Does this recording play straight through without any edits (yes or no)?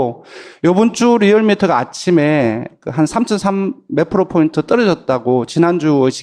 yes